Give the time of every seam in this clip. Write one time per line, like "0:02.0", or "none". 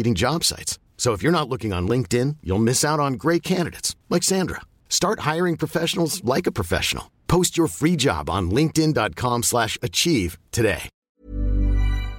0:10.9